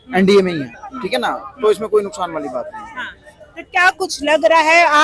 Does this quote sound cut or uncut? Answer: uncut